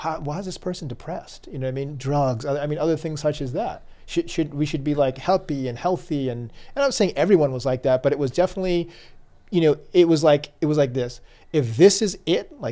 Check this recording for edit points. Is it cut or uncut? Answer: uncut